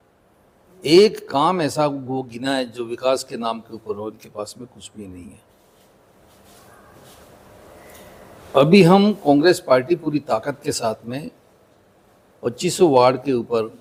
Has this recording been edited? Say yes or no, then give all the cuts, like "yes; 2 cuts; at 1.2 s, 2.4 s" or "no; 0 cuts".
no; 0 cuts